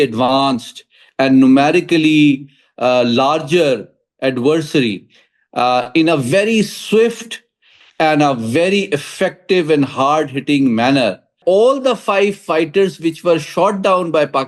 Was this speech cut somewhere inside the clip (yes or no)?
yes